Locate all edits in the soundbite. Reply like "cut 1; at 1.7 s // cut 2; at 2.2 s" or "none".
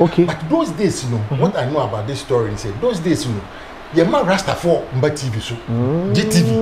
none